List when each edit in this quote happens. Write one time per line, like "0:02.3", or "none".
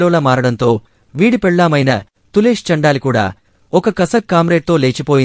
0:03.5